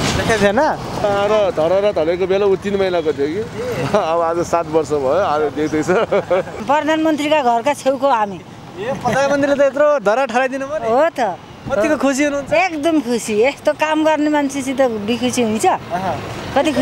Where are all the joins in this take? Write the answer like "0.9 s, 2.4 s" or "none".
1.0 s, 6.6 s